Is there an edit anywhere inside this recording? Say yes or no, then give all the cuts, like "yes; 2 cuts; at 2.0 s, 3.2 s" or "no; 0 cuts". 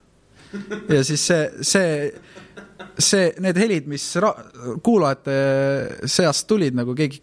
no; 0 cuts